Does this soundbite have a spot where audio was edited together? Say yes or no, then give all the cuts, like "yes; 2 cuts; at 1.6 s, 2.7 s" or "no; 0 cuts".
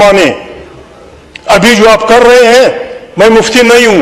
no; 0 cuts